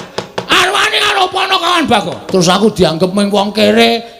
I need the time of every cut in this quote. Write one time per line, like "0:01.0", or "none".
0:02.2